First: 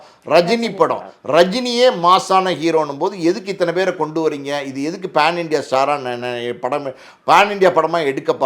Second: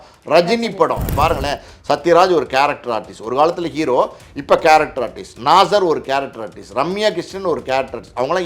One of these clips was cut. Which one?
second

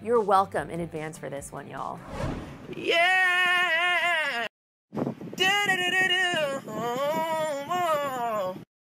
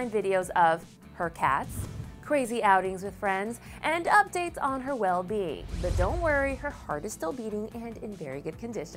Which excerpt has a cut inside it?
first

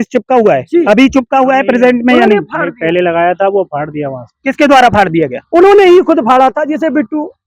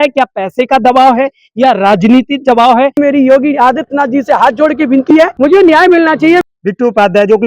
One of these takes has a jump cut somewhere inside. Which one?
second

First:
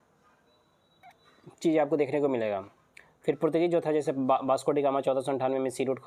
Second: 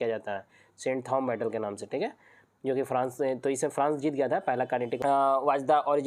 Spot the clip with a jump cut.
second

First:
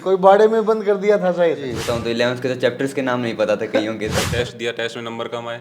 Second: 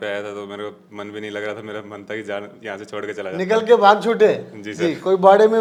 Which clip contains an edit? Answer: first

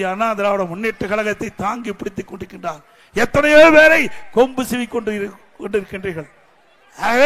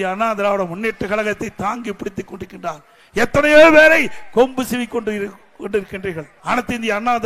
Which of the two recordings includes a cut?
second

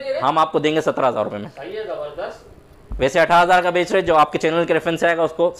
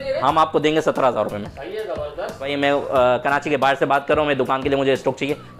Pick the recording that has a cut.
second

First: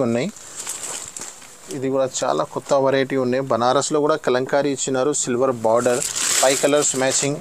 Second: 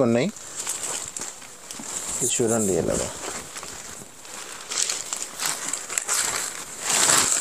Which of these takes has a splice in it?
first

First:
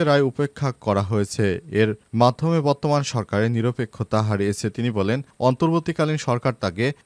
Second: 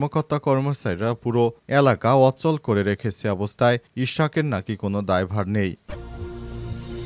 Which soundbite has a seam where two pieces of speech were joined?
second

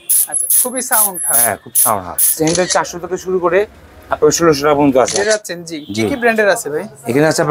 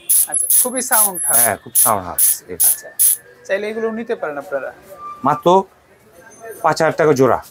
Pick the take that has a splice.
first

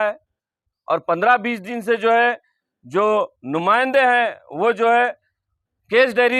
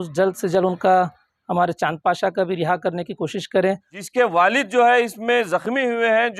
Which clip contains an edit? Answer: second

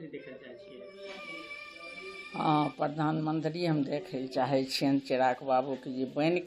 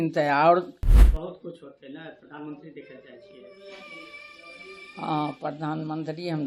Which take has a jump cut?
second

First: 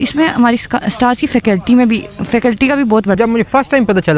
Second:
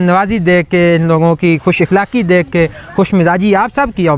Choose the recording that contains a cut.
first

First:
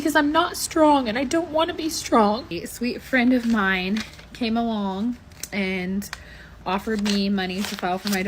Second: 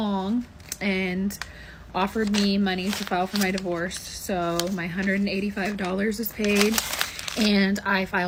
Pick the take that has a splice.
first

